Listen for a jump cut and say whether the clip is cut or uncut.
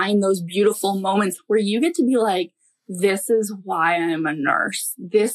cut